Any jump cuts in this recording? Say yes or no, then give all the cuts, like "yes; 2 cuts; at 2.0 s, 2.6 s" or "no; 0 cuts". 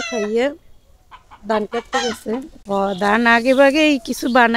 yes; 1 cut; at 2.5 s